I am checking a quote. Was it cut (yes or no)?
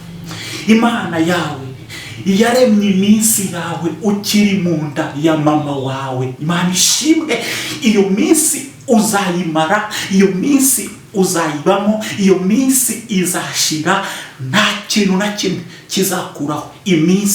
no